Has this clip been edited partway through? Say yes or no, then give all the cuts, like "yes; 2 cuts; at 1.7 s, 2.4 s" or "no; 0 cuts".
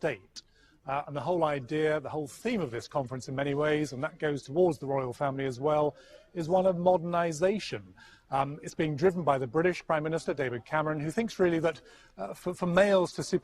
yes; 1 cut; at 9.5 s